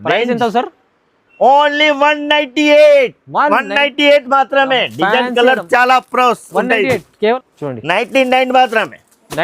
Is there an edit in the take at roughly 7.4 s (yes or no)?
yes